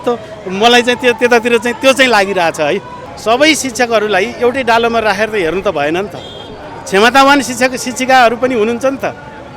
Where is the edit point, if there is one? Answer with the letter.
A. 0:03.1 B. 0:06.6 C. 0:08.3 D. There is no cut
A